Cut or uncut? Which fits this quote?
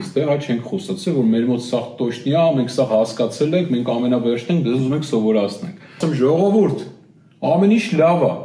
cut